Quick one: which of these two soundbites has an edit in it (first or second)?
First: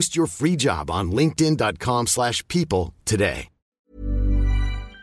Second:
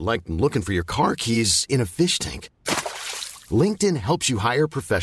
first